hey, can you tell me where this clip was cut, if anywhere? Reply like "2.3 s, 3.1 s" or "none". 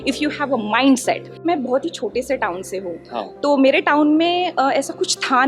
1.4 s